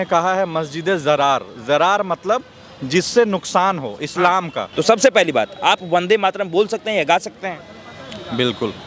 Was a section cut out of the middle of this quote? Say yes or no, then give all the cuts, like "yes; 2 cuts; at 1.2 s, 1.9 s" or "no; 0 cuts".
yes; 1 cut; at 4.6 s